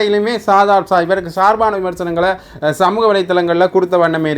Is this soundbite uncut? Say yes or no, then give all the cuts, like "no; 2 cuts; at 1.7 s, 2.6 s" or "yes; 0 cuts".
yes; 0 cuts